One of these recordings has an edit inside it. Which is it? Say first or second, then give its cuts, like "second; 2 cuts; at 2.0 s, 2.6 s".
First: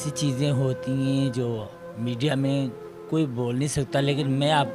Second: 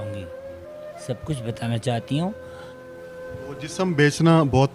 second; 2 cuts; at 2.5 s, 3.8 s